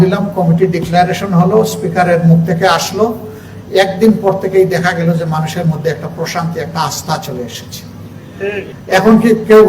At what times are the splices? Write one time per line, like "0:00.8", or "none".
0:08.7